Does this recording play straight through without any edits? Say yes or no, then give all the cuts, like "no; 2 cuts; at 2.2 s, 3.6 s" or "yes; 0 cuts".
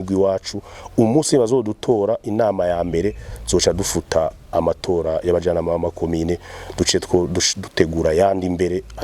yes; 0 cuts